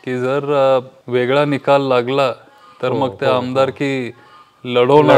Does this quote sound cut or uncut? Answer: cut